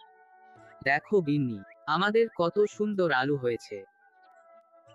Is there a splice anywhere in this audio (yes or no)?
yes